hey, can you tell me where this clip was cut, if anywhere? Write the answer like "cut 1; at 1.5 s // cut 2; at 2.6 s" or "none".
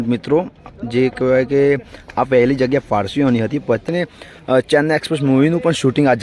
cut 1; at 3.8 s